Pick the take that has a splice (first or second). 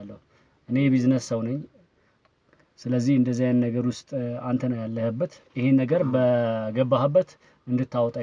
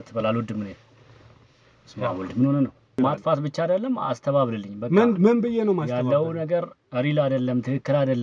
second